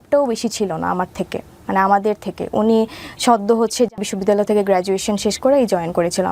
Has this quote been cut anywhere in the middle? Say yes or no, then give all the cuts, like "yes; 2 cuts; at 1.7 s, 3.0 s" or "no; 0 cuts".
yes; 1 cut; at 4.0 s